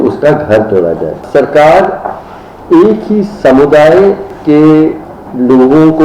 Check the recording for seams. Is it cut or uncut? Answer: cut